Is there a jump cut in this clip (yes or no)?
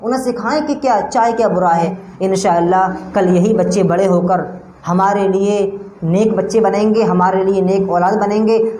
yes